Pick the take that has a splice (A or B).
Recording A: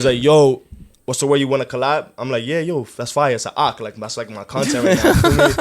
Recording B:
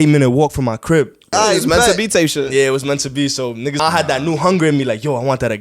B